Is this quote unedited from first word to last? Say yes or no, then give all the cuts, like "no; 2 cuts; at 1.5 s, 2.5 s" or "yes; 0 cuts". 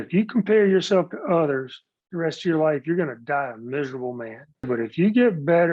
no; 1 cut; at 4.7 s